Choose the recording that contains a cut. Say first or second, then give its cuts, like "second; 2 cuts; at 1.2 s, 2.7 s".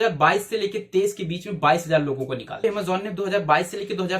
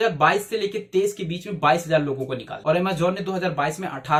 first; 1 cut; at 2.6 s